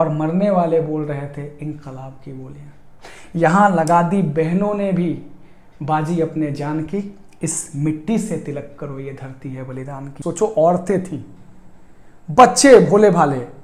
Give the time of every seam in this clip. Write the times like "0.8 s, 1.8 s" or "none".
10.1 s